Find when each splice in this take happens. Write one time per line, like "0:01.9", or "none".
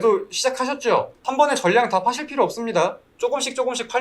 0:01.2
0:03.1